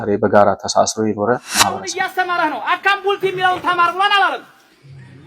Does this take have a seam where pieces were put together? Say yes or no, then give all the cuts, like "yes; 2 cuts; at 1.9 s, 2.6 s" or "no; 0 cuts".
yes; 1 cut; at 1.9 s